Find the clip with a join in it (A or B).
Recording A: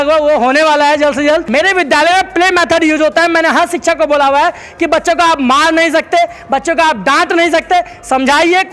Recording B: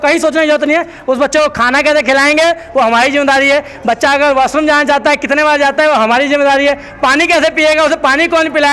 A